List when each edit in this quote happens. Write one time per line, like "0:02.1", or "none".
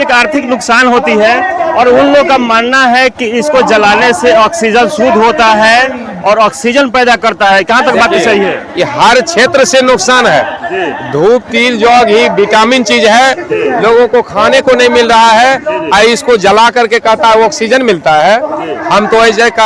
none